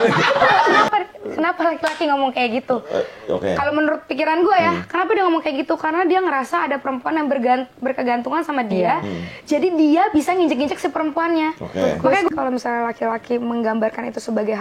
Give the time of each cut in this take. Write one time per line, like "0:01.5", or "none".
0:00.8
0:12.1